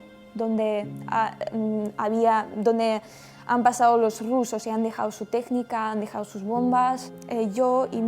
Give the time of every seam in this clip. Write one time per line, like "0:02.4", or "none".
0:07.2